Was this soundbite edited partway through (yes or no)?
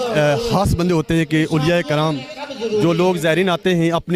no